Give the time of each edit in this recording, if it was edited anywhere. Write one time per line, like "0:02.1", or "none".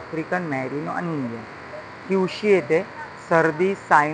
none